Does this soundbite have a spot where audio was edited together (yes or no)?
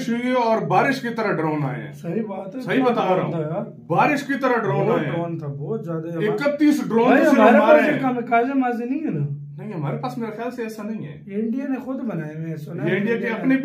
no